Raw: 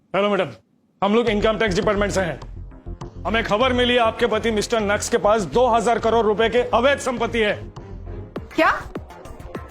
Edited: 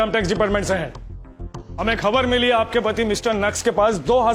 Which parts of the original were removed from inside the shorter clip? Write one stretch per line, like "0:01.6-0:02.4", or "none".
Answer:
none